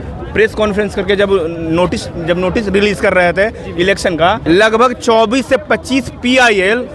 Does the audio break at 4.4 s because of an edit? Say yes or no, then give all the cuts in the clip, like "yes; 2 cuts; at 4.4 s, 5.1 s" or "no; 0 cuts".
yes; 1 cut; at 4.4 s